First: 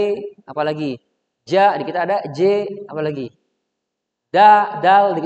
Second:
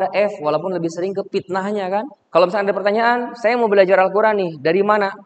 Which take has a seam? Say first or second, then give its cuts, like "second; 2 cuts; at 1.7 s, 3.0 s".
second; 1 cut; at 2.2 s